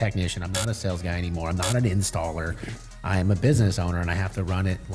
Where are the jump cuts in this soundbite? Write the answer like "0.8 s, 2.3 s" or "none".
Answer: none